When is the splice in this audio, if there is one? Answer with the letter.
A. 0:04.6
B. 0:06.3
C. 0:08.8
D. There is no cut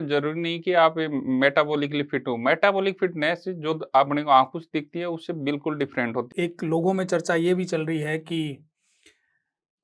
B